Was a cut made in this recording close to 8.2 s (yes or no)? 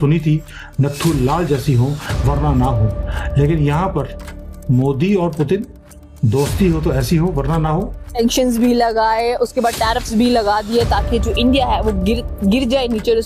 yes